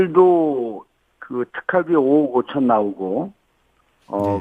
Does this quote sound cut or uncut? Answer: uncut